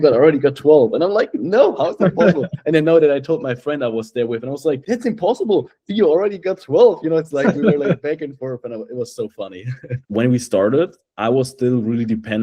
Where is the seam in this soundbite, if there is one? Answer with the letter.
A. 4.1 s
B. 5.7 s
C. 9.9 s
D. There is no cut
C